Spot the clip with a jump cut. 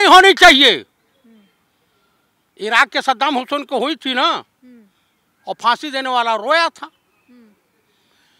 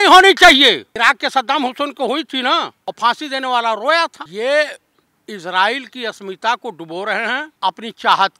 second; 4 cuts; at 0.9 s, 2.8 s, 4.2 s, 7.5 s

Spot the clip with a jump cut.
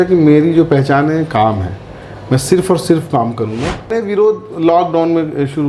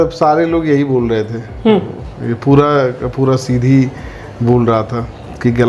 first; 1 cut; at 3.9 s

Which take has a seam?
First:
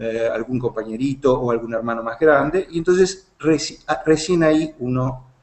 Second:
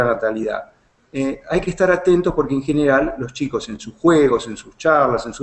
second; 1 cut; at 1.4 s

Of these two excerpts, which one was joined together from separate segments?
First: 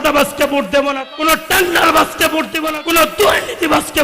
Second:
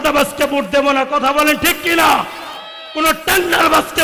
first; 2 cuts; at 1.0 s, 2.6 s

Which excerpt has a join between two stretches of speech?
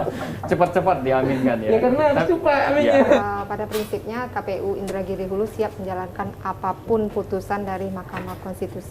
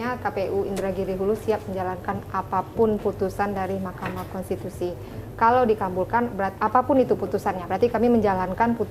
first; 1 cut; at 3.2 s

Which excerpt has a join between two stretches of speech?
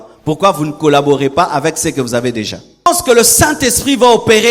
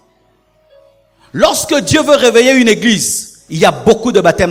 first; 1 cut; at 2.9 s

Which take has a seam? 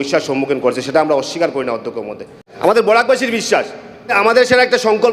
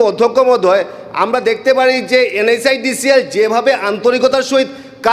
first; 2 cuts; at 2.4 s, 4.1 s

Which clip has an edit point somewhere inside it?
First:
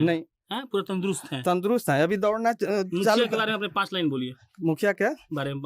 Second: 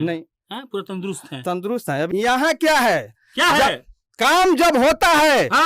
second; 1 cut; at 2.1 s

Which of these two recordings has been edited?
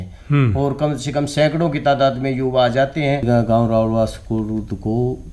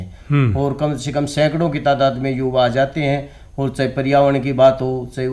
first; 1 cut; at 3.2 s

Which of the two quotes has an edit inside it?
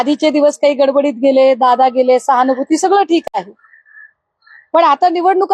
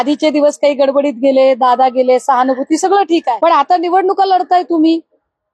second; 1 cut; at 3.3 s

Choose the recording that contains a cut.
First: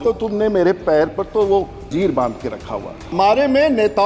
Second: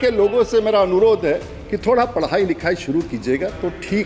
first; 2 cuts; at 1.9 s, 3.1 s

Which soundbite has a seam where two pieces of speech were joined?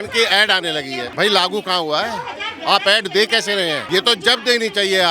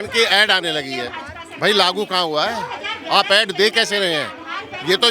first; 2 cuts; at 1.0 s, 3.8 s

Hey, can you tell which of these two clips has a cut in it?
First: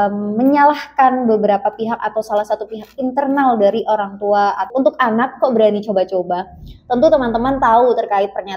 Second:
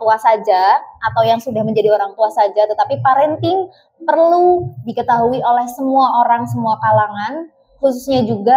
first; 1 cut; at 4.6 s

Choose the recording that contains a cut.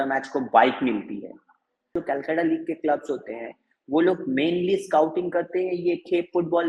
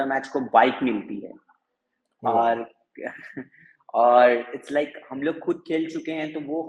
first; 1 cut; at 1.9 s

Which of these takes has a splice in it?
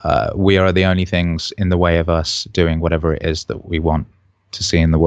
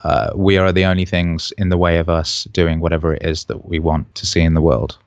second; 1 cut; at 4.2 s

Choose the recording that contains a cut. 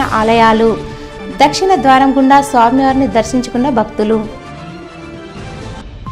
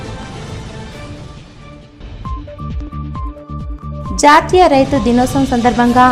second; 1 cut; at 3.7 s

